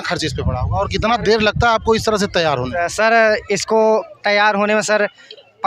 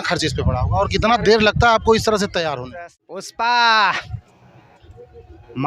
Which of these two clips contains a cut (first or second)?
second